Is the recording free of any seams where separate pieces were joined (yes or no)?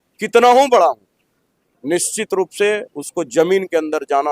yes